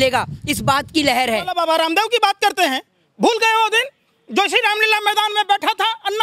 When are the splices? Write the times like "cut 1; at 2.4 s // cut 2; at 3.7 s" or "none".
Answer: cut 1; at 1.5 s